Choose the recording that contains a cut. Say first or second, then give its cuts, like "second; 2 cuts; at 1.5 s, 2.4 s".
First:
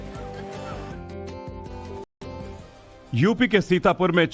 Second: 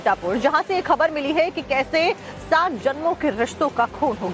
second; 1 cut; at 2.3 s